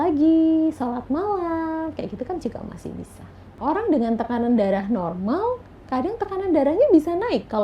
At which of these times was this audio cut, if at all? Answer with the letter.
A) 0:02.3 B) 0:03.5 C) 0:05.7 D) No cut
B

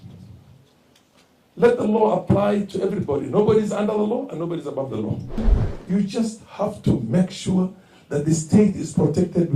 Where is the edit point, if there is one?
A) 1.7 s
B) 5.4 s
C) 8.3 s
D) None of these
B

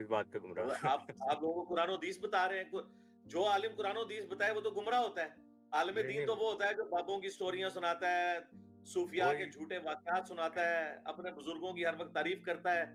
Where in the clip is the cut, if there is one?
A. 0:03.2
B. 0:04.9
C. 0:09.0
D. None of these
D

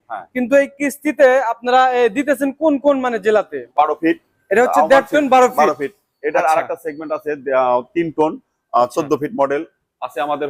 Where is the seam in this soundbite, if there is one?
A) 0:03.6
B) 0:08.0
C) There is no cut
A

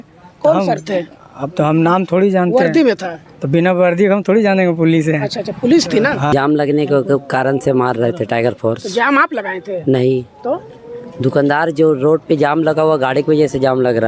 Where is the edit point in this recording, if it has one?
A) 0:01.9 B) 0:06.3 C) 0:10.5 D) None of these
B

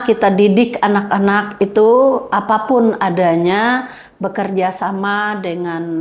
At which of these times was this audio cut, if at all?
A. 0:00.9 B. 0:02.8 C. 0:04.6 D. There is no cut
D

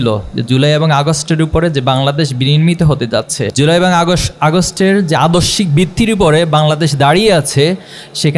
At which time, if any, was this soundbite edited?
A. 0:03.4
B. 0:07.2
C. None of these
A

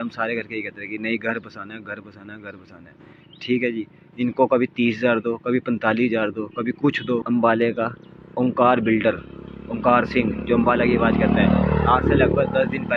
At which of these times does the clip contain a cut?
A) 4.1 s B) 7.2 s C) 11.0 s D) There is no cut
B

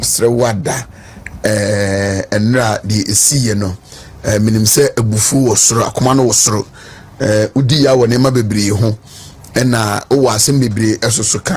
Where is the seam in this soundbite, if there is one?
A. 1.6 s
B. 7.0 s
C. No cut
C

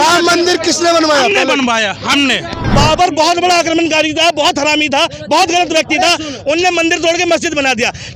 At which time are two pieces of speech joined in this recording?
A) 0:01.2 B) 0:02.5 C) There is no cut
B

